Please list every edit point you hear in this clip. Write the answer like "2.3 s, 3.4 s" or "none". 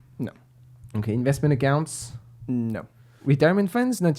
3.2 s

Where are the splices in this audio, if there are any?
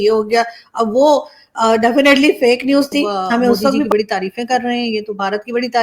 3.9 s

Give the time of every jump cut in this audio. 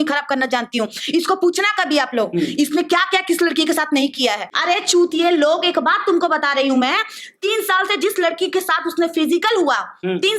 4.5 s

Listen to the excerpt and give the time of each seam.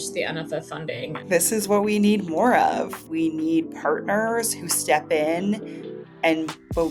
1.3 s, 3.0 s

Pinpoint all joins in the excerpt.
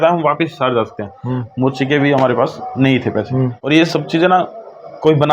3.6 s

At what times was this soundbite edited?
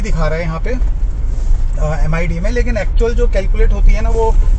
none

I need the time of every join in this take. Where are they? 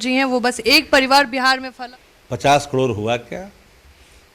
1.7 s

